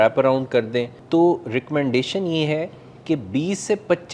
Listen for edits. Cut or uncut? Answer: cut